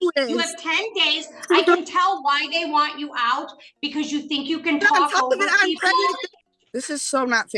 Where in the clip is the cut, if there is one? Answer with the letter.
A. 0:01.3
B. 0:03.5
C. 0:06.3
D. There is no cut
C